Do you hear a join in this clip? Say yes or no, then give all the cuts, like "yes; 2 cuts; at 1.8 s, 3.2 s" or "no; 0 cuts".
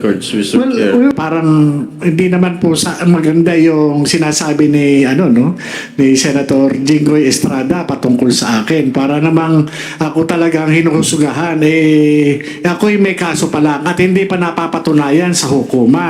yes; 1 cut; at 1.1 s